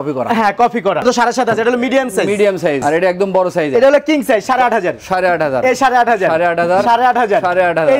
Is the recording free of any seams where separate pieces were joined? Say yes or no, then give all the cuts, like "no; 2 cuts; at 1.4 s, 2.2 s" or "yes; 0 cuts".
no; 2 cuts; at 1.0 s, 2.8 s